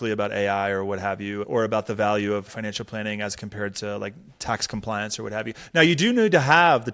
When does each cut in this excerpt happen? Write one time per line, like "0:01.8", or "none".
0:01.4
0:02.5